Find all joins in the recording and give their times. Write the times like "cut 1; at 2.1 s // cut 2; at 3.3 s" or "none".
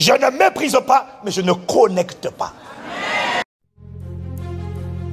cut 1; at 3.4 s